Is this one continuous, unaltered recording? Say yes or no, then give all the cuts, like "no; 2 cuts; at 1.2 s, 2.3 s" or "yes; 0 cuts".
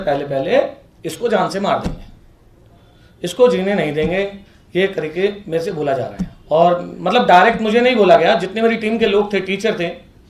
yes; 0 cuts